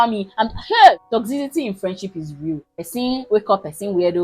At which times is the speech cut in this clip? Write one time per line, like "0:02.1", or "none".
0:01.0
0:02.7